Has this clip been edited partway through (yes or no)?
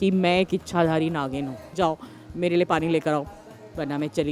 yes